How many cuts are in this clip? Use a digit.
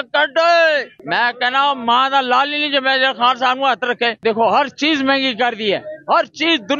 2